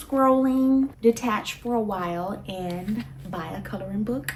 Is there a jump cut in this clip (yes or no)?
no